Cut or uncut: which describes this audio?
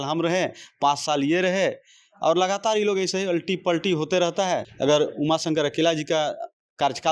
cut